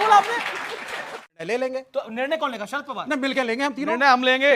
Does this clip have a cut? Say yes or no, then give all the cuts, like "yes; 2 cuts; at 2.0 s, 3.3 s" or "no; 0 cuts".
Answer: yes; 1 cut; at 1.2 s